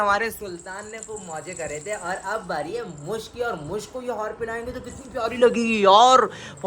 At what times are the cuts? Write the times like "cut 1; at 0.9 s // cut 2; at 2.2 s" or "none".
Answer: none